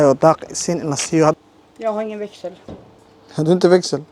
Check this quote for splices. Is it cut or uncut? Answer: cut